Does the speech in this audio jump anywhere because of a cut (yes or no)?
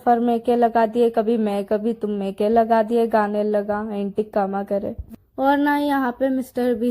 yes